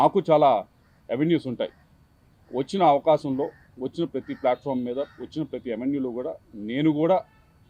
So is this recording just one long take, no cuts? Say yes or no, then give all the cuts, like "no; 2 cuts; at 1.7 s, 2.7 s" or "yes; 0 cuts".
yes; 0 cuts